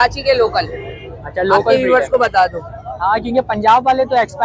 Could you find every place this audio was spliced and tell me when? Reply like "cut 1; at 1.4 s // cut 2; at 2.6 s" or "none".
none